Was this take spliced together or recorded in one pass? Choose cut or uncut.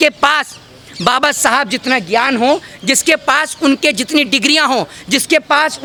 uncut